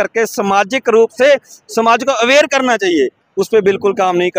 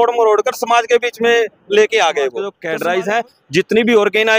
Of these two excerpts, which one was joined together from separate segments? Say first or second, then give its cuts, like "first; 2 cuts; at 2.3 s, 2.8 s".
second; 1 cut; at 2.6 s